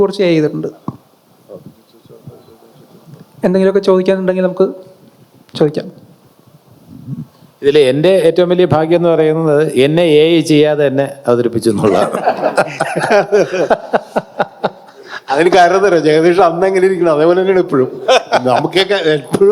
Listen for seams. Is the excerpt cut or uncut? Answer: uncut